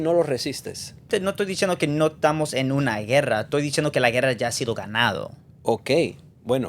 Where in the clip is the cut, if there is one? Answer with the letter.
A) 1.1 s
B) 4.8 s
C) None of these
A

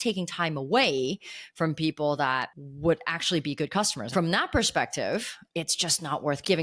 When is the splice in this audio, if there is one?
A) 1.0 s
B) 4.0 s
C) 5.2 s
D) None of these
B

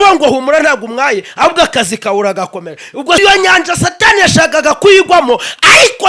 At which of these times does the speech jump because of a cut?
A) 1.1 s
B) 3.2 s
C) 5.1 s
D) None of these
B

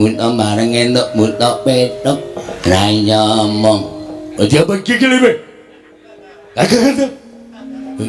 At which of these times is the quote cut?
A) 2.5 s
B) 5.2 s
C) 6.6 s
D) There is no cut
A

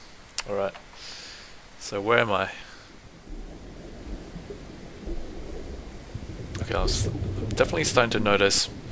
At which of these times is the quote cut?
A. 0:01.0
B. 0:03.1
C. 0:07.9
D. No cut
B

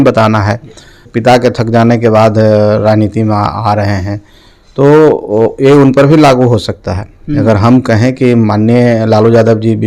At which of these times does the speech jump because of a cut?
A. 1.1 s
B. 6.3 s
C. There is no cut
A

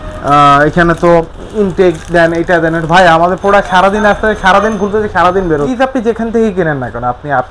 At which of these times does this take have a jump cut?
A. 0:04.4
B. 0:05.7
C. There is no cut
B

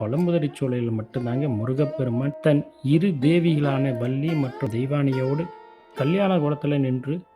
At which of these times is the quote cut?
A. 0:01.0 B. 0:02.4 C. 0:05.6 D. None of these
B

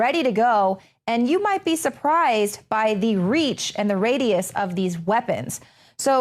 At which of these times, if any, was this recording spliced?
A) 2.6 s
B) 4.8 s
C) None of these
B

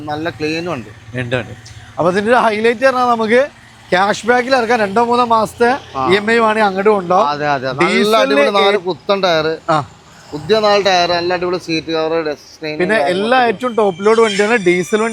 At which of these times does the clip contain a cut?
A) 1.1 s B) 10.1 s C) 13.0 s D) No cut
D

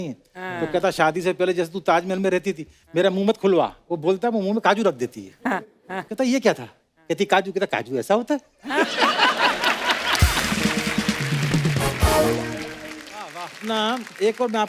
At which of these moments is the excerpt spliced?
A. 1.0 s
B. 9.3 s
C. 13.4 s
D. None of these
C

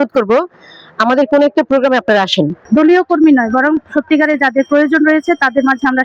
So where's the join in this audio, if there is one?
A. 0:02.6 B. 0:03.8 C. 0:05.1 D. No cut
A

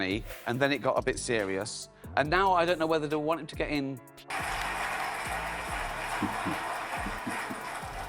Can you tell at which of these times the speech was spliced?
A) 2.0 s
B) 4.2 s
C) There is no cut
B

